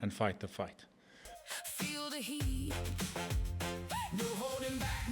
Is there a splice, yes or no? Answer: yes